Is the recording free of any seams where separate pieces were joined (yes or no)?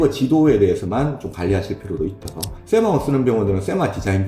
no